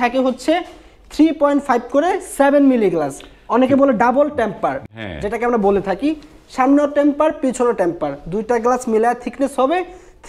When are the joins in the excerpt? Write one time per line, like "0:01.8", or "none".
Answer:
none

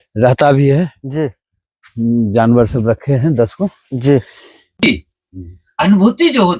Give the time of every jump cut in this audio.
0:04.6

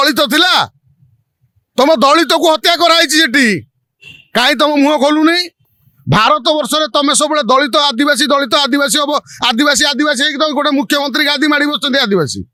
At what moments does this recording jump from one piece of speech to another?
none

